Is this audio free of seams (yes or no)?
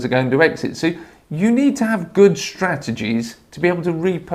yes